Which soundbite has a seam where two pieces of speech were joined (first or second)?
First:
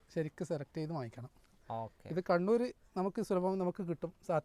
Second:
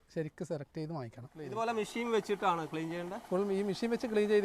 second